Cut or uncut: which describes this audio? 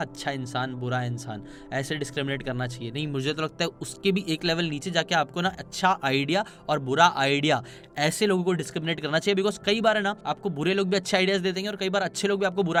uncut